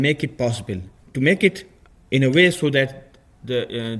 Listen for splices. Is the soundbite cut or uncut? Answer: cut